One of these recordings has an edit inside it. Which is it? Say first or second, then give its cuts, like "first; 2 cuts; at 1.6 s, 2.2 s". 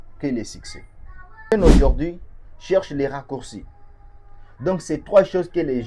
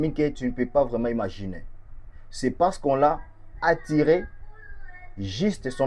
first; 1 cut; at 1.5 s